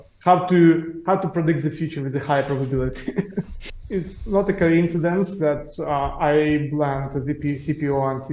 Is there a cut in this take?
yes; 1 cut; at 3.6 s

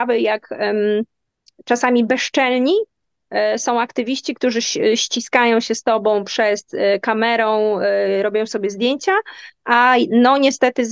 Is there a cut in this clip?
no; 0 cuts

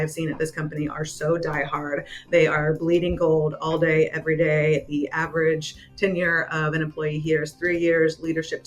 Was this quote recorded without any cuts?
yes; 0 cuts

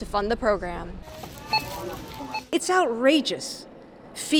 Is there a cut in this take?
no; 0 cuts

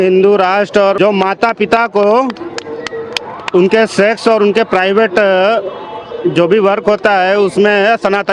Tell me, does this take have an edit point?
yes; 1 cut; at 1.0 s

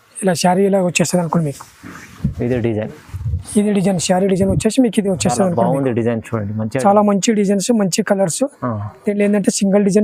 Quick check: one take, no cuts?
yes; 0 cuts

